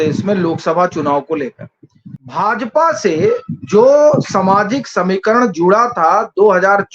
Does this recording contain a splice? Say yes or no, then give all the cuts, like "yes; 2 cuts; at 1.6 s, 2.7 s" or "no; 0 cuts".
yes; 1 cut; at 2.1 s